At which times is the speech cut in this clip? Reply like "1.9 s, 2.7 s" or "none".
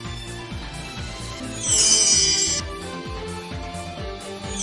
1.0 s